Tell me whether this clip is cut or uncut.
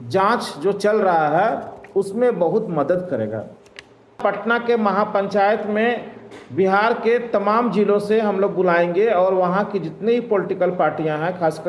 cut